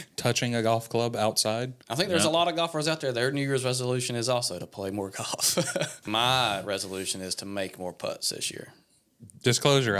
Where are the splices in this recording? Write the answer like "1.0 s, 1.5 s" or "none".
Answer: 1.8 s, 6.0 s